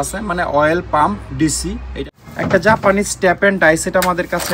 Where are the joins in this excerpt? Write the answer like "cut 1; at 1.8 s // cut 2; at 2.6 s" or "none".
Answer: cut 1; at 2.0 s